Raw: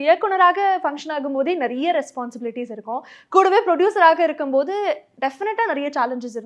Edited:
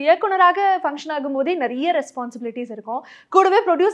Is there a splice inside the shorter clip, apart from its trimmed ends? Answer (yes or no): no